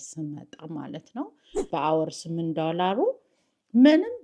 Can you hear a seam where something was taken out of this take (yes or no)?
yes